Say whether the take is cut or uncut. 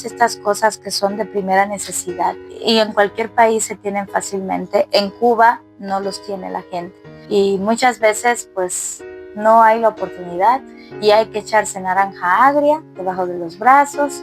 uncut